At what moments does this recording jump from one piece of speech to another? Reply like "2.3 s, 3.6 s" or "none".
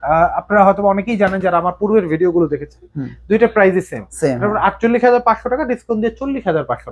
none